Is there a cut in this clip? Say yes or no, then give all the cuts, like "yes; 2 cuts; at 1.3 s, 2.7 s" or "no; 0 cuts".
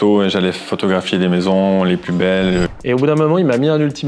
yes; 1 cut; at 2.7 s